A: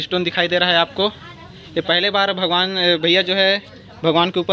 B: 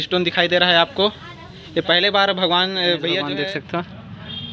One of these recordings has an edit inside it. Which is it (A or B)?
B